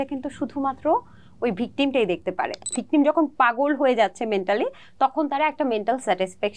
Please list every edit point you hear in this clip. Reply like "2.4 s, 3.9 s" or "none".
2.8 s